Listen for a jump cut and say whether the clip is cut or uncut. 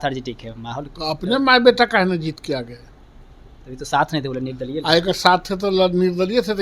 uncut